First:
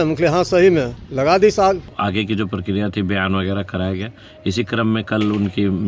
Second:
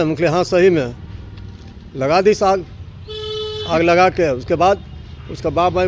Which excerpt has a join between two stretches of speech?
first; 2 cuts; at 1.0 s, 1.9 s

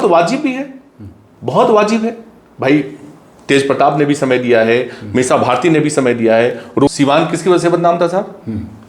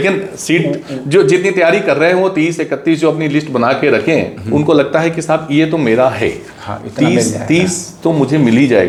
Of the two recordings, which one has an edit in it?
first; 1 cut; at 6.7 s

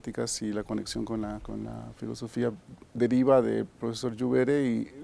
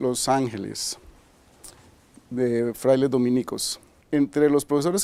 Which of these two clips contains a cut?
first; 1 cut; at 2.0 s

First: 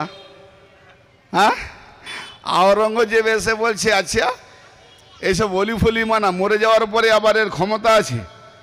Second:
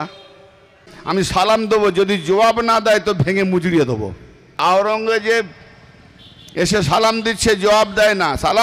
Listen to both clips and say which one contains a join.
second; 2 cuts; at 0.9 s, 4.6 s

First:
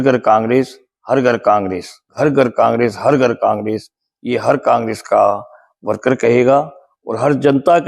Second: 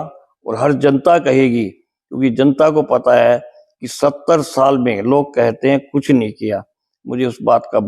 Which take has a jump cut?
first; 1 cut; at 2.1 s

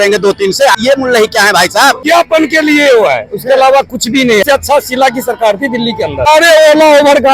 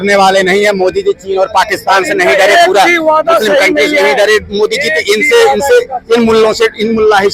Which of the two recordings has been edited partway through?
first; 4 cuts; at 0.8 s, 2.0 s, 4.4 s, 6.3 s

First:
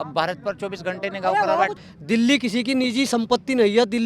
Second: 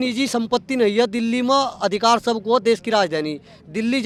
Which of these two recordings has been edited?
first; 1 cut; at 1.8 s

